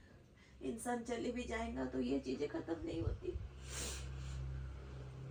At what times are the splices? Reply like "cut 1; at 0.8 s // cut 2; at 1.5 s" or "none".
none